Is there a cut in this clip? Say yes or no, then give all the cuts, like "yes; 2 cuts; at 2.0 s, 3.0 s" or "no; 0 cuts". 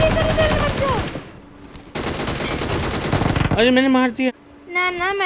yes; 1 cut; at 4.3 s